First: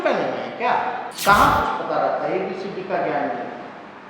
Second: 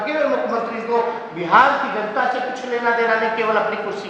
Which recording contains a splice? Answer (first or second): first